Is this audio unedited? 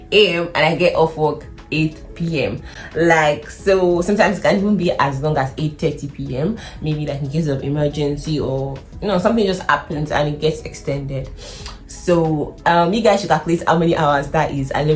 yes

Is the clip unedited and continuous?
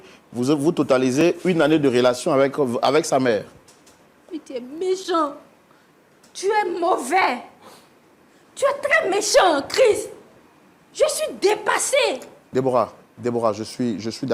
yes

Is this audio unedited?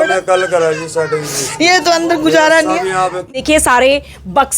no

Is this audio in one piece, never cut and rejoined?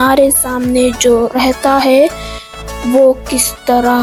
yes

